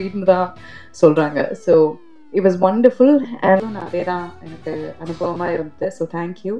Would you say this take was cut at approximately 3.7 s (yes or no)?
yes